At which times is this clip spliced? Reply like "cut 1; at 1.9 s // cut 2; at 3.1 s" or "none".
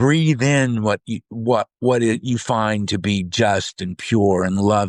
none